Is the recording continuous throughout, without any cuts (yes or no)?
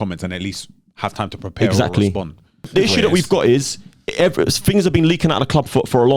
no